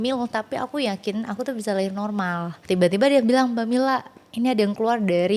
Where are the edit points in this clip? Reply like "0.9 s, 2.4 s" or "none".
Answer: 2.6 s